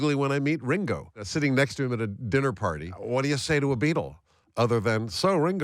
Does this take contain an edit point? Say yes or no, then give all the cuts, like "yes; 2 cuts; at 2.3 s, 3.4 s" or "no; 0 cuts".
yes; 2 cuts; at 1.3 s, 2.9 s